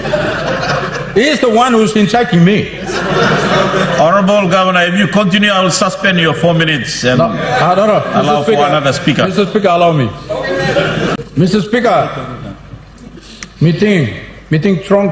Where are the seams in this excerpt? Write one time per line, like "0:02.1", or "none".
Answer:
0:11.2